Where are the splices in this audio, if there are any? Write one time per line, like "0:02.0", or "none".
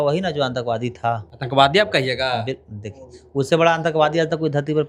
0:01.3